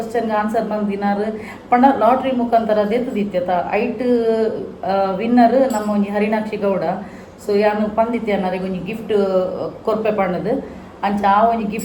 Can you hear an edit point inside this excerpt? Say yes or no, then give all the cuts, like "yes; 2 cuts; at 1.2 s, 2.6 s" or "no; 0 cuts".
no; 0 cuts